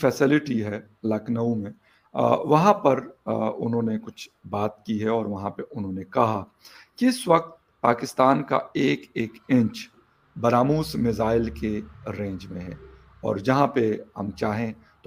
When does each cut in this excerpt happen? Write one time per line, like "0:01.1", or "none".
none